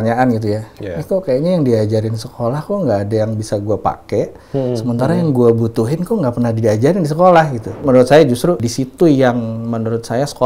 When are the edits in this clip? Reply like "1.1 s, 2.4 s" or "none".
7.8 s, 8.7 s